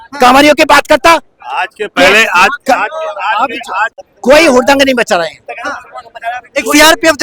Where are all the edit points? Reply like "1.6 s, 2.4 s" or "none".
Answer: 4.1 s